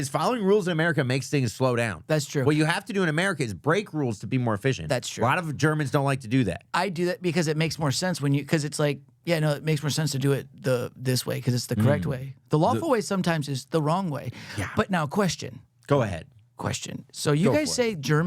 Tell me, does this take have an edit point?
no; 0 cuts

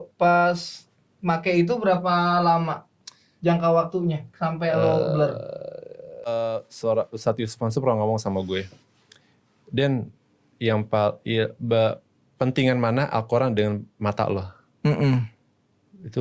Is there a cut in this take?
yes; 1 cut; at 6.3 s

